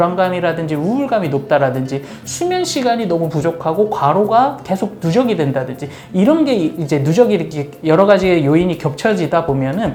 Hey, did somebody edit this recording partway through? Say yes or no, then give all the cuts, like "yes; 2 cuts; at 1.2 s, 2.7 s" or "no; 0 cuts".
no; 0 cuts